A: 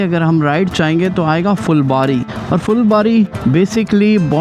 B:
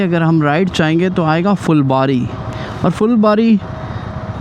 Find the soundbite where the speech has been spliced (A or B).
A